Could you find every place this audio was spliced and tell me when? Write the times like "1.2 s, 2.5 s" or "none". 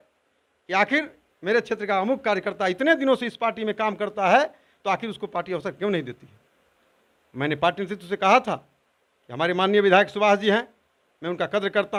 none

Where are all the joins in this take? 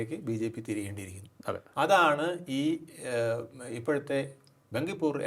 none

